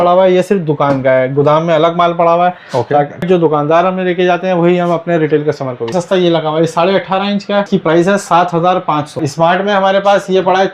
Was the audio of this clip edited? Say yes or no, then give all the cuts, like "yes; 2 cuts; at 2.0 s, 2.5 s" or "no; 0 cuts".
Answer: yes; 4 cuts; at 3.2 s, 5.9 s, 7.7 s, 9.2 s